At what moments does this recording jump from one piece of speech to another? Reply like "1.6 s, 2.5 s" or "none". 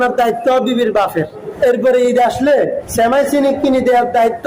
1.4 s, 2.8 s